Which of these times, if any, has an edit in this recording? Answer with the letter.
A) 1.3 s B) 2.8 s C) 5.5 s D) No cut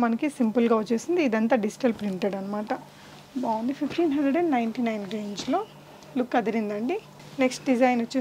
D